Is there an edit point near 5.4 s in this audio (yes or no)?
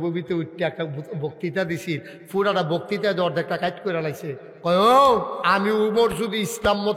yes